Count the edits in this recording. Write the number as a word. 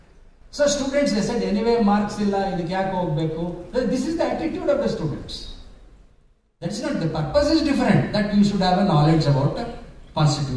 one